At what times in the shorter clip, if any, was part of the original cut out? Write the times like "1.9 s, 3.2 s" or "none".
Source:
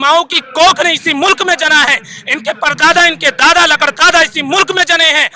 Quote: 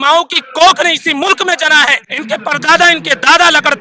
2.1 s